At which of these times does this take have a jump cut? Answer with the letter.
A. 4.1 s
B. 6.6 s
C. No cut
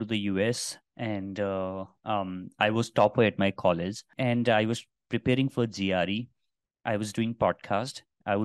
A